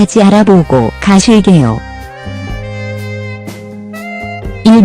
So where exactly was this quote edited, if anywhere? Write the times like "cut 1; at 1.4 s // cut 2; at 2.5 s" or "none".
cut 1; at 3.4 s